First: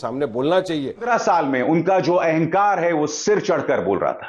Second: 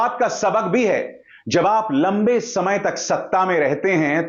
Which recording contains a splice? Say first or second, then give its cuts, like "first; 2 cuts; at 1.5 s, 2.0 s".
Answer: first; 1 cut; at 1.1 s